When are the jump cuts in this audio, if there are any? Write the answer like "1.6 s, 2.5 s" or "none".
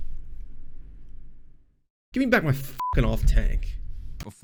none